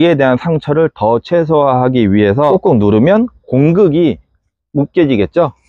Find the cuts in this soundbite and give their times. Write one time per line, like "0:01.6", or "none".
0:02.5